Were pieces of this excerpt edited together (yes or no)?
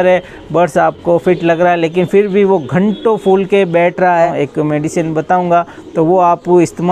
yes